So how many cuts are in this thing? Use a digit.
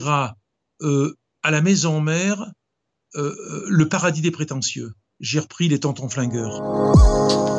1